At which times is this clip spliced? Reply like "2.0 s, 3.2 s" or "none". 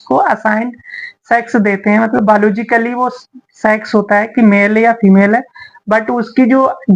none